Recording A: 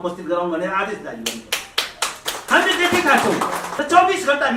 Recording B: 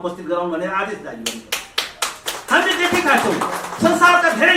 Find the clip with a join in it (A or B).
A